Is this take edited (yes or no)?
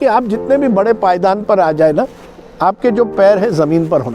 no